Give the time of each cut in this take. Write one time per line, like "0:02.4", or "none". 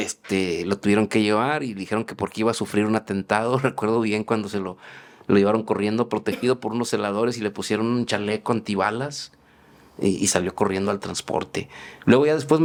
none